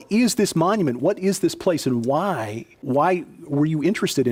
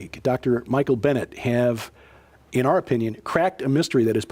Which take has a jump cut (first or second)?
second